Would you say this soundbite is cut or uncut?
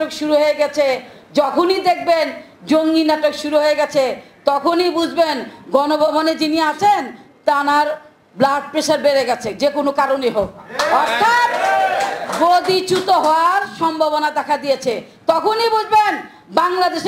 uncut